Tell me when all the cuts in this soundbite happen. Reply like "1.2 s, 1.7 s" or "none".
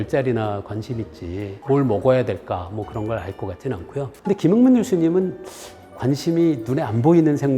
4.1 s